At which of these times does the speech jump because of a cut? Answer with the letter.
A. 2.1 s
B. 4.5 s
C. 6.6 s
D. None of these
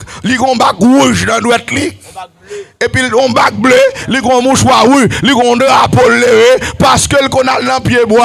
D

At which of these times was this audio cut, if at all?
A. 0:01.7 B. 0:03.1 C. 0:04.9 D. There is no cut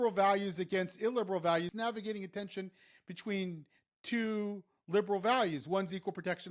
A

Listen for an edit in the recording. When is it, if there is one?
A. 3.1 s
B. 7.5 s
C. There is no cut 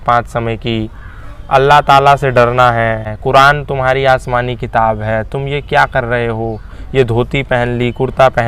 A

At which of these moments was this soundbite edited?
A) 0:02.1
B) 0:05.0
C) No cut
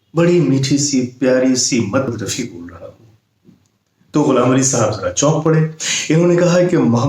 A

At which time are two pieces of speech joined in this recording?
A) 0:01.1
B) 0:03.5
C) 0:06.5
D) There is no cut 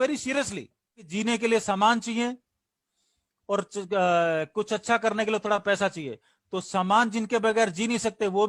A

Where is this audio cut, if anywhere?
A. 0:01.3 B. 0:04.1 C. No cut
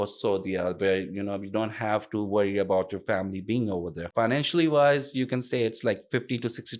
B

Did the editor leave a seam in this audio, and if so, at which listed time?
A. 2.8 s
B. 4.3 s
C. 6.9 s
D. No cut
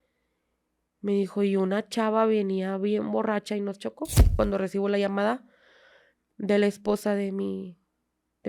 B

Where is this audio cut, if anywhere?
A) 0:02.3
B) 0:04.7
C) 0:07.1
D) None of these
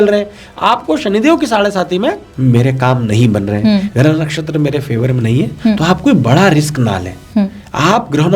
A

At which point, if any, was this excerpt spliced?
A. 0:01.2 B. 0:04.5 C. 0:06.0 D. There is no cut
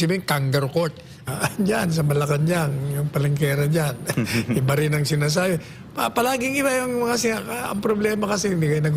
A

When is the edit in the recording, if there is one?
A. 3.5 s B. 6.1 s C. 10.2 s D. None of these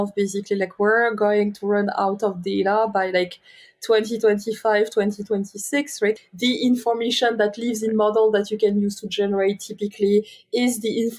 B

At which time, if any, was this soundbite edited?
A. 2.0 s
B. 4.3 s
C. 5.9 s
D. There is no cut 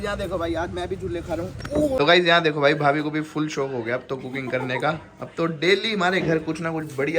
A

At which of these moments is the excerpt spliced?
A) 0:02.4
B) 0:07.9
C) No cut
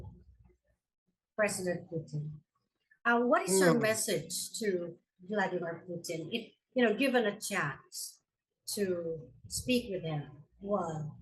C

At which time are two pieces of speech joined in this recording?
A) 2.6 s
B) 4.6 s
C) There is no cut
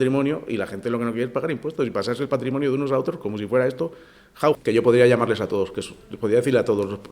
B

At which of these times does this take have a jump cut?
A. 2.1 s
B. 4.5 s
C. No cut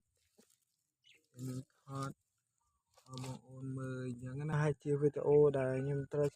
B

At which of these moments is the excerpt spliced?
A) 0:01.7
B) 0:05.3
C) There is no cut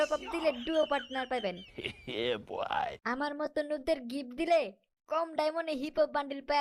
C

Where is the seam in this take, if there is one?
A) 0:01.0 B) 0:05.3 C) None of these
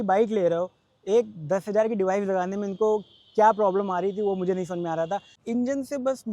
B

